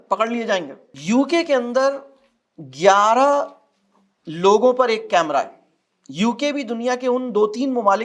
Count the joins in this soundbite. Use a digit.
0